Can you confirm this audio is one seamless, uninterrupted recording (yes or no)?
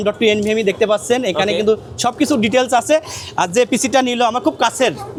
yes